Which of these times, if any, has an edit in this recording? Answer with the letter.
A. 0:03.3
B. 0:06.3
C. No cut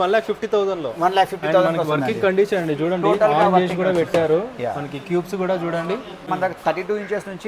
B